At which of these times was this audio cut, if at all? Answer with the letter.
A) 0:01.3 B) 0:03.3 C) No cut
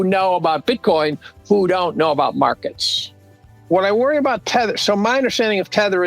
B